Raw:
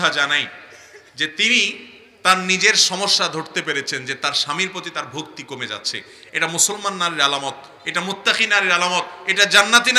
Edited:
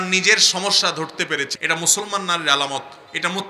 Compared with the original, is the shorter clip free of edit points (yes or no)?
no